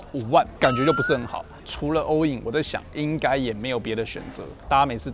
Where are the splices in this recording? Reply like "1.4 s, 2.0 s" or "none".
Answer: 1.5 s